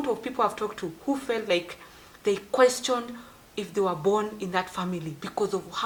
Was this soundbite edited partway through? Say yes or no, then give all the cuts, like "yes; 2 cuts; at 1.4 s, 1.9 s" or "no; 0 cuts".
no; 0 cuts